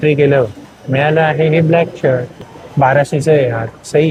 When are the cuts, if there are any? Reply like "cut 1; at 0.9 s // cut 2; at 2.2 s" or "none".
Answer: none